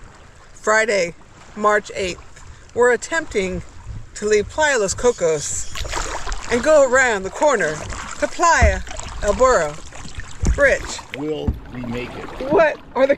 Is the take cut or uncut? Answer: uncut